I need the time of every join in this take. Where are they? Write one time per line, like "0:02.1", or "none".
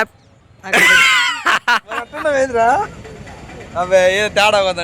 0:02.1